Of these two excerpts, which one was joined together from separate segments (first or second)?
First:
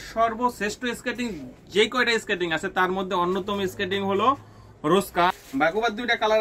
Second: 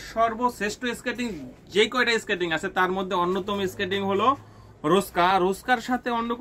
first